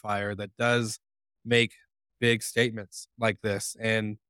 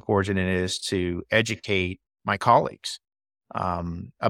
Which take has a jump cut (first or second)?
second